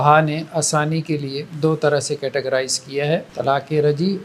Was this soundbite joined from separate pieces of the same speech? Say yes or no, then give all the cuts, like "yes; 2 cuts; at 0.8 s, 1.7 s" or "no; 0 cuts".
yes; 2 cuts; at 1.4 s, 3.3 s